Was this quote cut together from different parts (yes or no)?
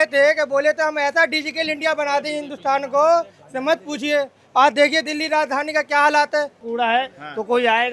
yes